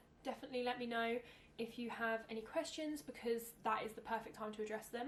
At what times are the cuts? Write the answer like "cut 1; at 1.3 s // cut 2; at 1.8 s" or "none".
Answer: none